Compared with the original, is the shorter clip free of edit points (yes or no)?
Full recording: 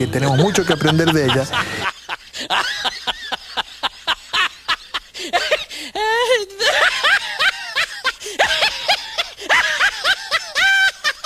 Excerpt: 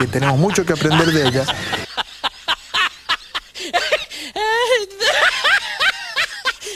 no